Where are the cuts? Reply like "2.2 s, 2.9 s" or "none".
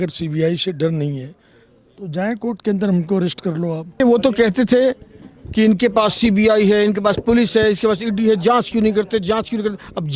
4.0 s